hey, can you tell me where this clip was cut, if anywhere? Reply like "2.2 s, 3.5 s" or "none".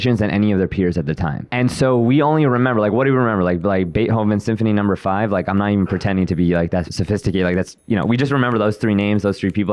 1.5 s, 6.9 s